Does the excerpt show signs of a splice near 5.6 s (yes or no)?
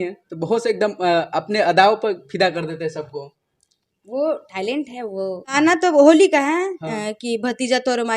yes